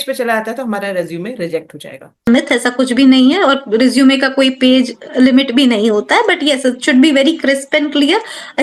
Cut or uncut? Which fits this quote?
cut